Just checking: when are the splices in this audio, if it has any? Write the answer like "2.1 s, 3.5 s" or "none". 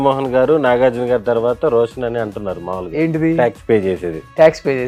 none